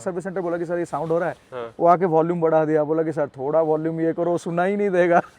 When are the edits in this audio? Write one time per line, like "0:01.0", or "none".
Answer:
none